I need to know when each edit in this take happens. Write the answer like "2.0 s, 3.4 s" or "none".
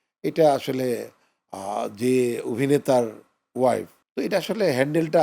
4.0 s